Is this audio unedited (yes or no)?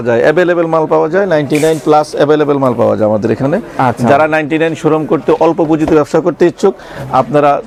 yes